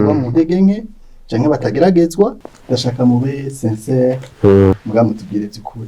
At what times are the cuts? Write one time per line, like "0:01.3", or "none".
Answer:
0:02.5
0:04.8